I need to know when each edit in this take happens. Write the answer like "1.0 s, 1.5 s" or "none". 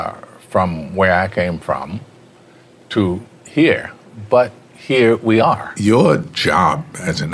5.7 s